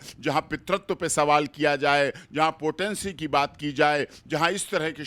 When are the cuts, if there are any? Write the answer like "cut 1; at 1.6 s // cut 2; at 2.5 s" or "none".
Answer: none